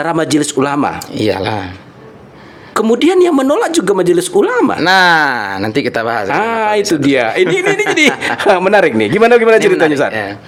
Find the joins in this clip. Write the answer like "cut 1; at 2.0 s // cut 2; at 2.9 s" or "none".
none